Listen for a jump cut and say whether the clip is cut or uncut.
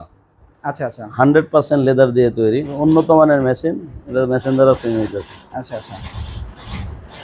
cut